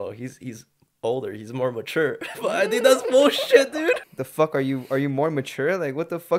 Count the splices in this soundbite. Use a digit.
1